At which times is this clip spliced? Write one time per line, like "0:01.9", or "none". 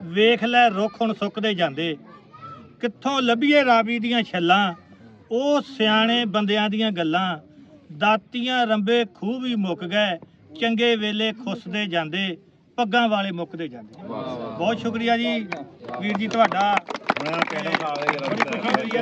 none